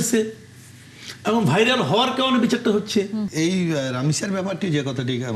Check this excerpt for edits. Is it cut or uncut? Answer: cut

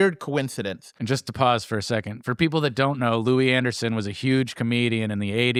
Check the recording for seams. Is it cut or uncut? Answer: uncut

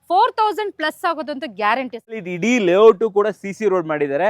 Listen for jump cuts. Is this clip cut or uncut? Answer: cut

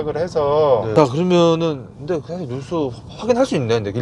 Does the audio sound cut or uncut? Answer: cut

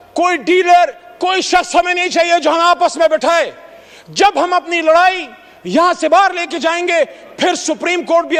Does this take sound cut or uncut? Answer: uncut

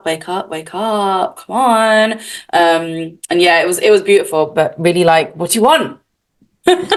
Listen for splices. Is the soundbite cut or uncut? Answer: uncut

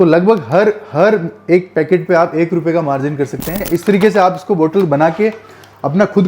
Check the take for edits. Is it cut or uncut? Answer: cut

